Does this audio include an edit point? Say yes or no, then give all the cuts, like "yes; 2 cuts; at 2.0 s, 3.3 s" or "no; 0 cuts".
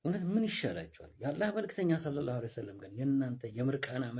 no; 0 cuts